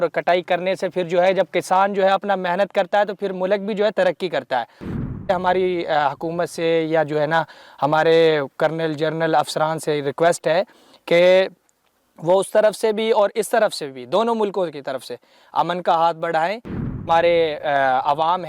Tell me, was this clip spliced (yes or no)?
yes